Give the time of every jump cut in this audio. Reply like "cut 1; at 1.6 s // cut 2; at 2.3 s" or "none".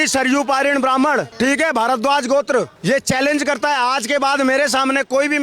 cut 1; at 1.3 s // cut 2; at 2.7 s